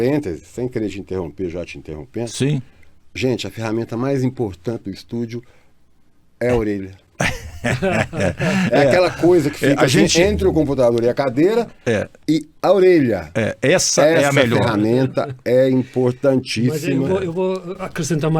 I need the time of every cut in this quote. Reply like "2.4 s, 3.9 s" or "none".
none